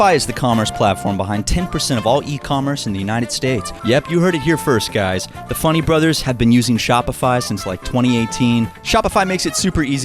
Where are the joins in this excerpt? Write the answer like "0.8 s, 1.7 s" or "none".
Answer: 3.7 s, 8.8 s